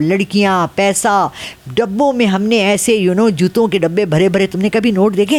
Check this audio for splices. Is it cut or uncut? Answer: uncut